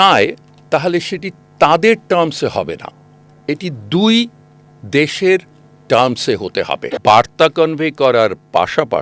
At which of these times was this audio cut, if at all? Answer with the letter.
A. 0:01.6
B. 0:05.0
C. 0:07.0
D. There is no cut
C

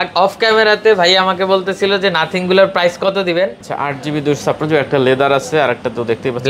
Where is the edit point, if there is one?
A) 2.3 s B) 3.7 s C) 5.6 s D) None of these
B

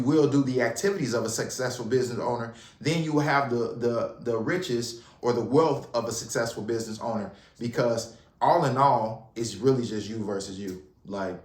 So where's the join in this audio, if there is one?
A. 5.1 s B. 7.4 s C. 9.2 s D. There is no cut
B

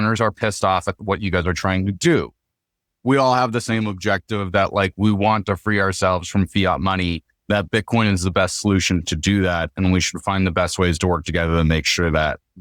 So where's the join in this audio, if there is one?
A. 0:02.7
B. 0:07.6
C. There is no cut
A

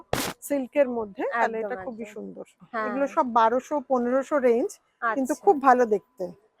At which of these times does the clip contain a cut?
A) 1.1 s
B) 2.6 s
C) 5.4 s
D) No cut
B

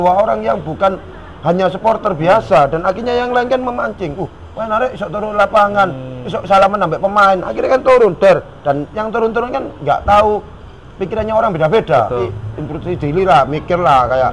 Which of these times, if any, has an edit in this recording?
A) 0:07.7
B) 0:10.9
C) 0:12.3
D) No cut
C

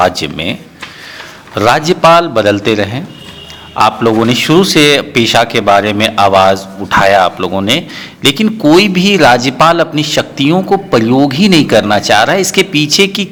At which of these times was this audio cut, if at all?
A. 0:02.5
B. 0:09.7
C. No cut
C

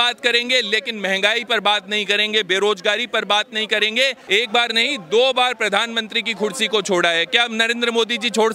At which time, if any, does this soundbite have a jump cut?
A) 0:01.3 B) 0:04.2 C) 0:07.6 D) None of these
B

